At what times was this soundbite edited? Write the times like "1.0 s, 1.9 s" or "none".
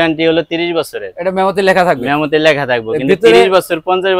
none